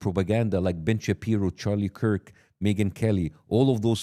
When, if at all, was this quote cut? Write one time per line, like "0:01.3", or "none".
none